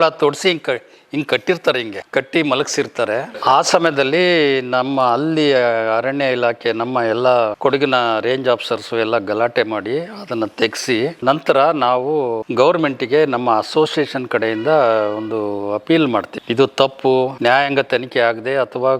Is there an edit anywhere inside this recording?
no; 0 cuts

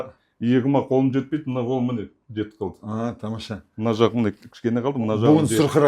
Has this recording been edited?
no; 0 cuts

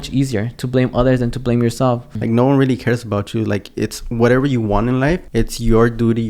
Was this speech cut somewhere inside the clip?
yes; 2 cuts; at 2.1 s, 5.2 s

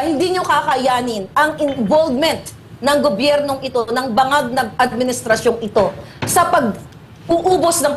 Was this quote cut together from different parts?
no; 0 cuts

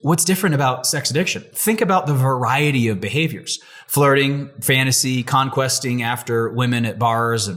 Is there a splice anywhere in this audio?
no; 0 cuts

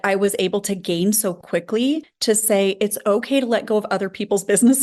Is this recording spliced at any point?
yes; 1 cut; at 2.1 s

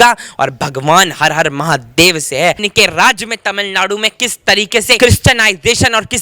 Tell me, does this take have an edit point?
yes; 2 cuts; at 2.7 s, 5.0 s

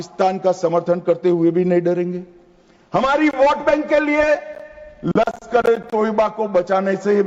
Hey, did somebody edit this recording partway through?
no; 0 cuts

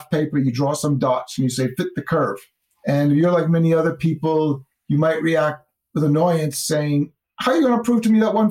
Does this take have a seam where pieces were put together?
yes; 2 cuts; at 4.7 s, 7.2 s

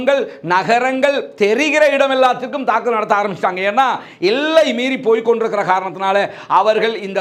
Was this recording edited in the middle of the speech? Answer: no; 0 cuts

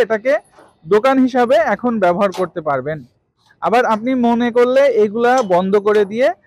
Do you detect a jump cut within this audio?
no; 0 cuts

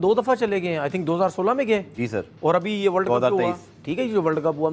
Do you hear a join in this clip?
no; 0 cuts

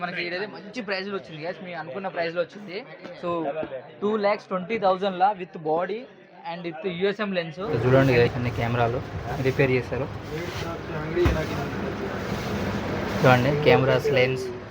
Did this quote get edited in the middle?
yes; 1 cut; at 7.6 s

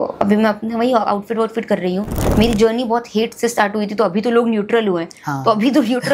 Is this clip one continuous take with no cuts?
no; 1 cut; at 2.1 s

